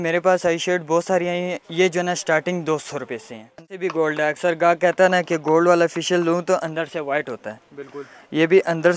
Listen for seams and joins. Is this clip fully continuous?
no; 1 cut; at 3.8 s

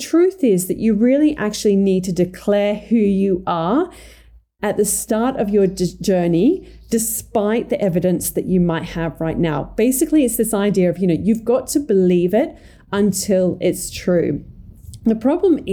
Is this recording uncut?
yes; 0 cuts

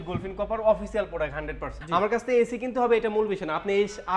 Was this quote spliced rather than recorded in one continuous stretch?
yes; 1 cut; at 1.7 s

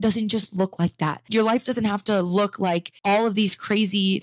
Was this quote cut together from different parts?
yes; 2 cuts; at 1.2 s, 2.9 s

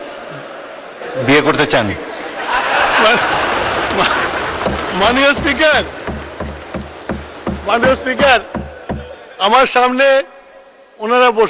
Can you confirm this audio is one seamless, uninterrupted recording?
yes; 0 cuts

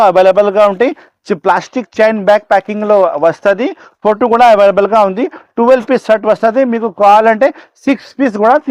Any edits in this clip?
no; 0 cuts

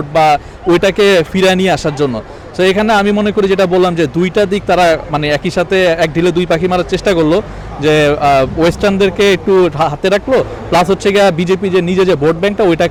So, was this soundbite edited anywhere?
no; 0 cuts

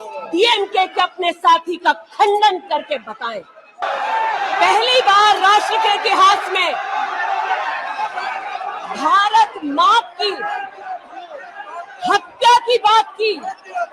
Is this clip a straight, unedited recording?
no; 1 cut; at 3.8 s

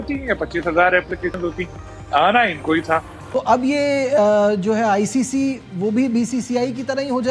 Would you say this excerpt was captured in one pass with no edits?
no; 1 cut; at 3.2 s

